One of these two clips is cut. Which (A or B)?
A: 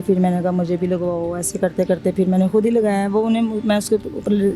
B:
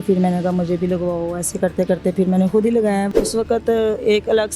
B